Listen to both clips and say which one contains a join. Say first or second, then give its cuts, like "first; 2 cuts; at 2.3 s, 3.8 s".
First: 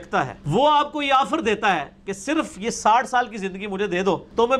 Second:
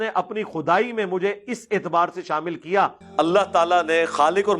second; 1 cut; at 3.0 s